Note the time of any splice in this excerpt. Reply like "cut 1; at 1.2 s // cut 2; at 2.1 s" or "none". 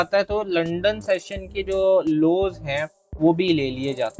none

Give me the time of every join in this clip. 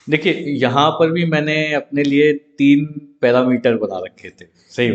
none

